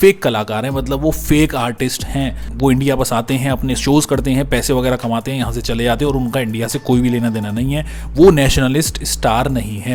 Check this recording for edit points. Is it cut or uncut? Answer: uncut